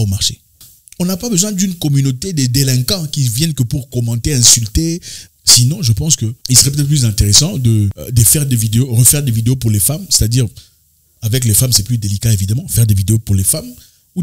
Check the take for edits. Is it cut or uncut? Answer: uncut